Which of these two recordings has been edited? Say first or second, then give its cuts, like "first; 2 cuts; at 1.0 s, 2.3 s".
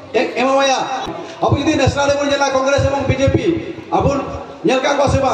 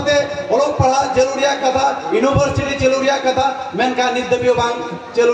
first; 1 cut; at 1.1 s